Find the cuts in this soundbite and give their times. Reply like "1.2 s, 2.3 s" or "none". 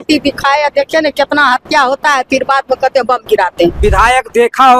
3.8 s